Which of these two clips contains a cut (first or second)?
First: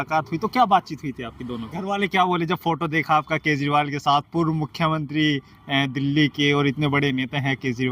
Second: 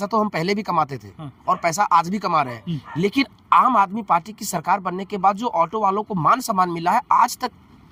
first